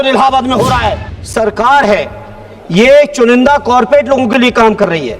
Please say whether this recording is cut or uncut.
cut